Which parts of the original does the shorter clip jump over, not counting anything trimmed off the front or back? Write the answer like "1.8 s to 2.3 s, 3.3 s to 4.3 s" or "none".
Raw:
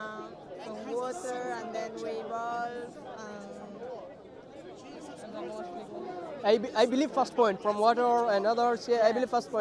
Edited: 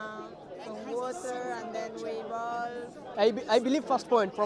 3.1 s to 6.4 s

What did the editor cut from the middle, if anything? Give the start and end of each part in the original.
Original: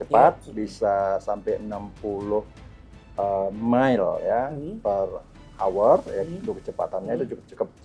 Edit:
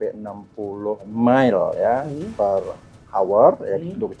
2.6 s to 3.6 s

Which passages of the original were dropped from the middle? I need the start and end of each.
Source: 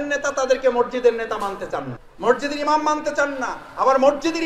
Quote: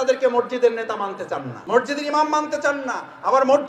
1.9 s to 2.0 s

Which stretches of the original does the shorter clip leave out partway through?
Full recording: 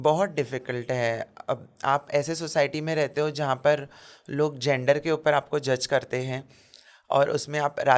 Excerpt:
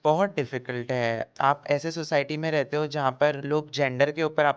1.3 s to 1.7 s, 3.9 s to 4.3 s

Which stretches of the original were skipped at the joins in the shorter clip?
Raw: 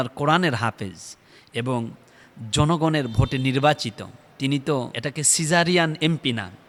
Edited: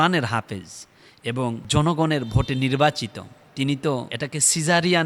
1.9 s to 2.5 s

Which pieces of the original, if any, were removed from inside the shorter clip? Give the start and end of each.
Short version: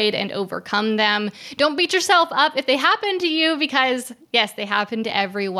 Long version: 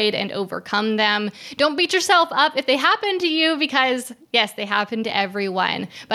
none

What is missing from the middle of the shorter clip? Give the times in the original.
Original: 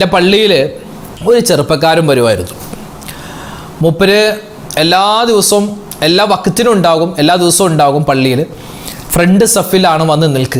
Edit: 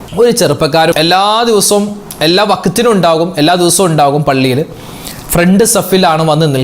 2.0 s to 4.7 s

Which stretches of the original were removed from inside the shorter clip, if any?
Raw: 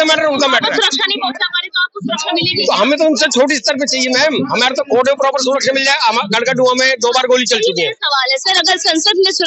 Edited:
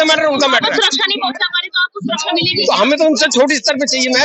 none

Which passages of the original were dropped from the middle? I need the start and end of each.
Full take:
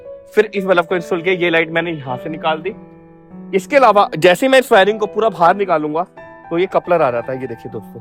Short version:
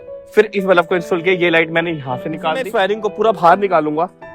2.7 s to 4.7 s

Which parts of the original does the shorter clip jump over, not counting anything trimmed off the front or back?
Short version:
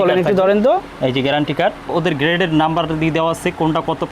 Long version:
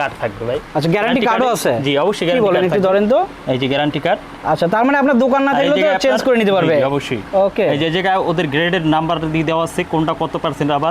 4.4 s to 8.2 s

